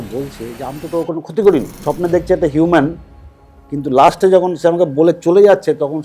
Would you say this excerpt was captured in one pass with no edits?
no; 1 cut; at 1.8 s

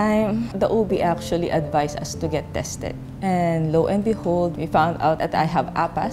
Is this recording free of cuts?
yes; 0 cuts

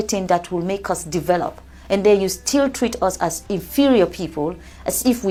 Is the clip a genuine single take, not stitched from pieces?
yes; 0 cuts

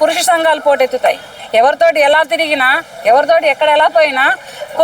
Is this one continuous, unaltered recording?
no; 1 cut; at 1.3 s

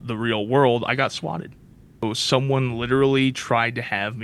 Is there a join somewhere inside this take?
yes; 1 cut; at 2.0 s

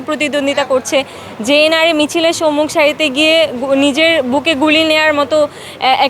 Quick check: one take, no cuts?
yes; 0 cuts

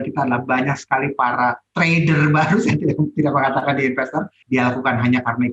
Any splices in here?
yes; 1 cut; at 4.4 s

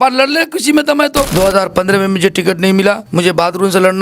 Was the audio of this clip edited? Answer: yes; 2 cuts; at 1.3 s, 3.0 s

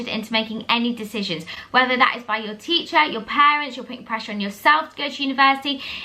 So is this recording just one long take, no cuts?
yes; 0 cuts

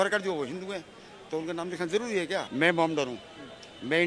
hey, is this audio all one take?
no; 1 cut; at 2.5 s

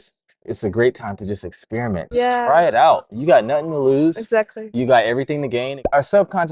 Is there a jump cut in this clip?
yes; 2 cuts; at 2.0 s, 5.7 s

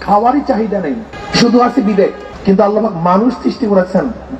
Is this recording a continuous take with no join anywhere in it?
no; 2 cuts; at 1.1 s, 2.3 s

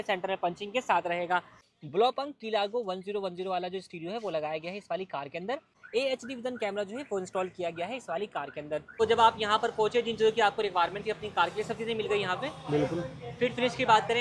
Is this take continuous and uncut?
no; 3 cuts; at 1.6 s, 5.7 s, 9.0 s

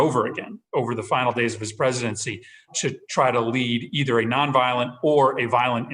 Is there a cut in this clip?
yes; 1 cut; at 2.7 s

